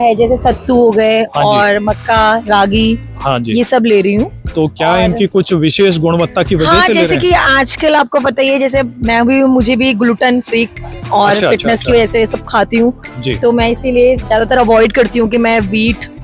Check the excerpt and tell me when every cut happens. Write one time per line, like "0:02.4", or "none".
none